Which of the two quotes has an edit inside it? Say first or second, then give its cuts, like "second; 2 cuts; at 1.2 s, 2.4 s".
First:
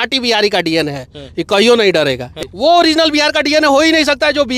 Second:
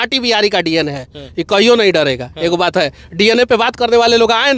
first; 1 cut; at 2.3 s